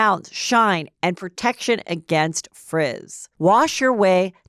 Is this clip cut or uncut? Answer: cut